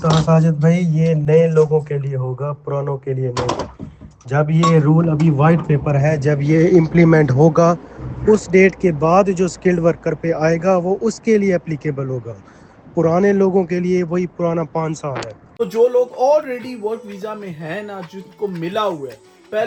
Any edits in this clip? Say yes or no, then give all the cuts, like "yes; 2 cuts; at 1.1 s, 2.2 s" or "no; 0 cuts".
no; 0 cuts